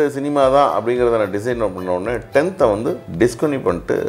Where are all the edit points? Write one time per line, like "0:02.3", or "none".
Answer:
0:03.0

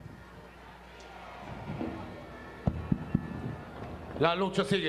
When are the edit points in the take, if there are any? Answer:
none

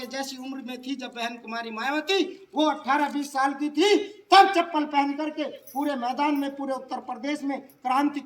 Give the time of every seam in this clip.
none

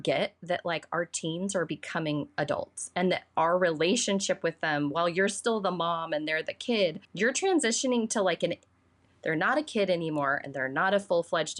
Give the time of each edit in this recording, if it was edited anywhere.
0:07.0

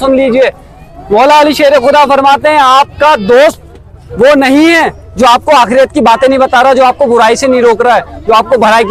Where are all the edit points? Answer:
none

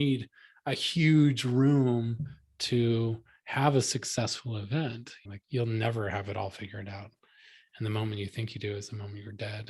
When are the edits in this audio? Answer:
0:05.3

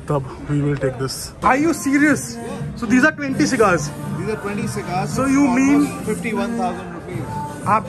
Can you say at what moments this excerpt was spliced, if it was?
0:01.4

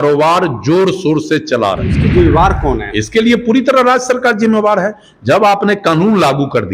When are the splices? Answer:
0:02.0

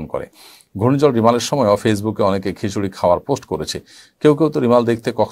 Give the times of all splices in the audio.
none

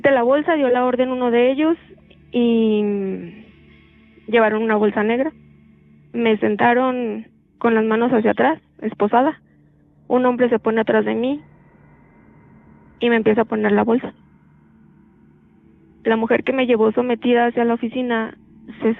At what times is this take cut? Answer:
0:14.5
0:16.0

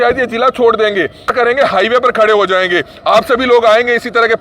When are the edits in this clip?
0:01.3

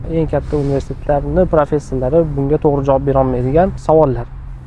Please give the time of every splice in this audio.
0:03.8

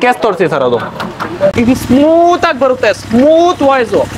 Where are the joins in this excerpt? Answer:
0:01.5

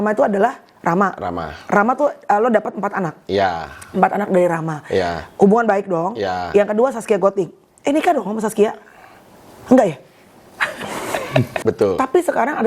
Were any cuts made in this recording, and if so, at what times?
0:11.5

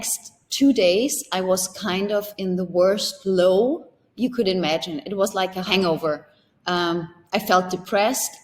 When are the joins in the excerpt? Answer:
0:05.7

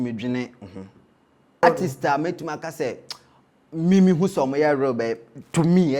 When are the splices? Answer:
0:01.6

